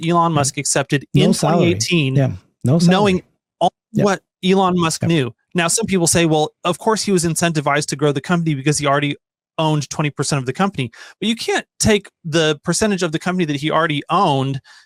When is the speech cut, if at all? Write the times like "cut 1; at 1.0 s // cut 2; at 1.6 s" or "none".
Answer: none